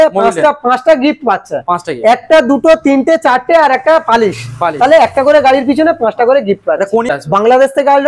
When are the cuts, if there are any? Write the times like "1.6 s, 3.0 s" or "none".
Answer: 7.1 s